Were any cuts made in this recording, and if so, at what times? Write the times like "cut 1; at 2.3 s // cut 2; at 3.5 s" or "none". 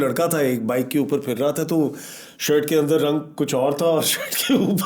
none